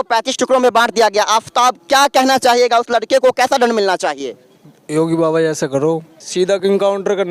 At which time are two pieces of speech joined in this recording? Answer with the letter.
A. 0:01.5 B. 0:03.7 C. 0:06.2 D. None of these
C